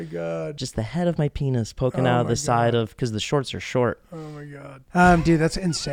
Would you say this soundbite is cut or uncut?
cut